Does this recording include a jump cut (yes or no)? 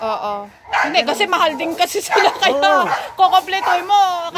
no